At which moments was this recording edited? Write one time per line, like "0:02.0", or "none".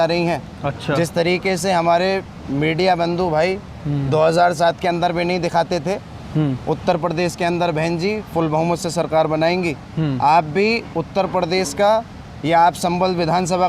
none

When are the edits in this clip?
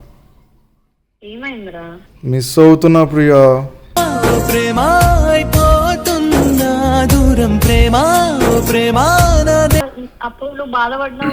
0:09.8

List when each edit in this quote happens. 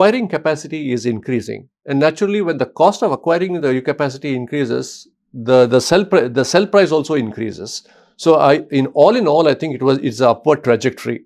none

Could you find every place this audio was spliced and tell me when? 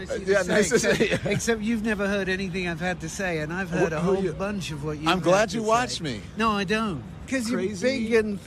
0:07.3

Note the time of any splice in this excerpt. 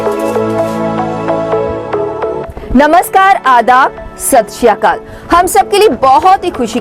0:02.8

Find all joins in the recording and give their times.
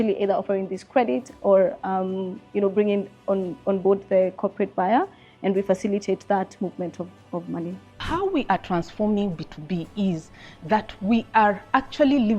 0:08.0

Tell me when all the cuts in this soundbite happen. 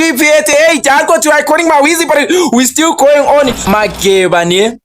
0:03.7

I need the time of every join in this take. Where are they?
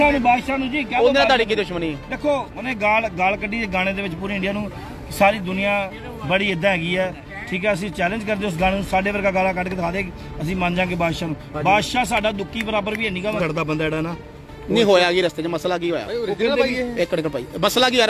0:13.4

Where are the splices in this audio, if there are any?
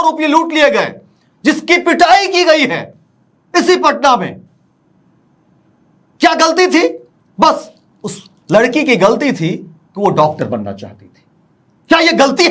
none

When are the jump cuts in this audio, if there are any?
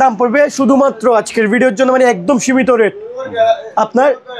none

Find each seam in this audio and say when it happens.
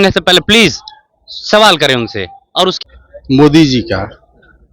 0:02.8

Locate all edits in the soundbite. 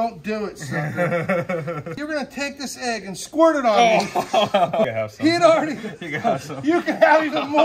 0:01.9
0:04.9

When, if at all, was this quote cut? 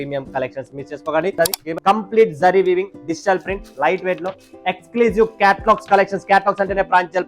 0:01.3

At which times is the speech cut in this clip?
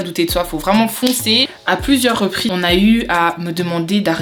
0:01.5
0:02.5

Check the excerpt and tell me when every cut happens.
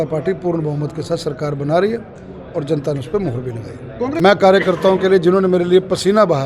0:04.2

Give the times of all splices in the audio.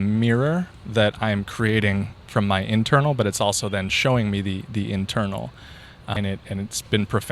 0:06.2

